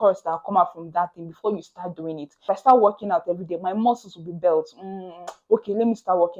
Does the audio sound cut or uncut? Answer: cut